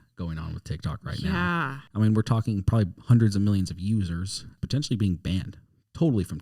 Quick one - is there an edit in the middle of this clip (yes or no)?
yes